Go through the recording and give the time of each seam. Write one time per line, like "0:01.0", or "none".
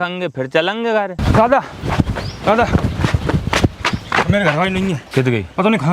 0:01.2
0:05.0